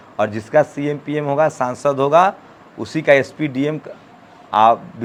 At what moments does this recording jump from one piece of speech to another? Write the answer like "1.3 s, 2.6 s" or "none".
none